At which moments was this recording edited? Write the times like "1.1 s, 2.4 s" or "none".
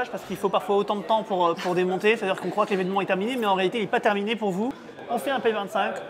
4.9 s